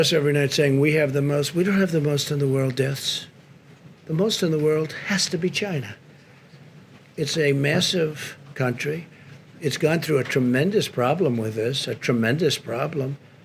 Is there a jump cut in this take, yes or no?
no